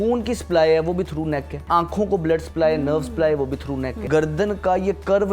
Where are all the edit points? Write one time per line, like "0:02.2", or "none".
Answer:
0:01.6
0:04.0

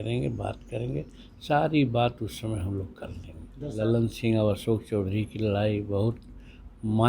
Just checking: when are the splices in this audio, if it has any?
0:03.7

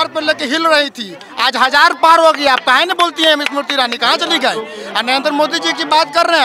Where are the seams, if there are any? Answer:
none

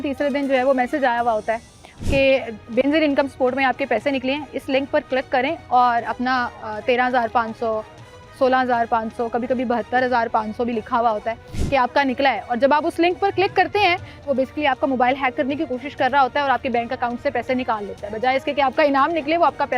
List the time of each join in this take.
0:14.3

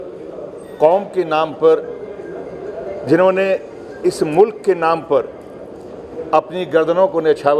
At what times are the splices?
none

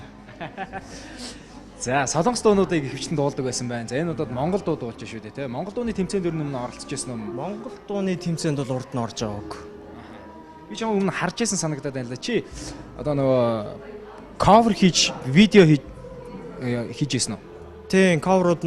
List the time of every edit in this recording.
0:13.6

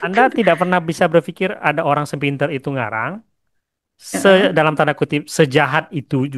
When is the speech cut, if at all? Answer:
none

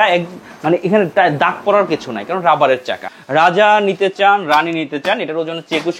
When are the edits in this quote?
0:03.1

